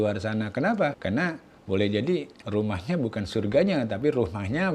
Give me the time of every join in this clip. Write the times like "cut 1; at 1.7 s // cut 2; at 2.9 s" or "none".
cut 1; at 1.0 s // cut 2; at 2.4 s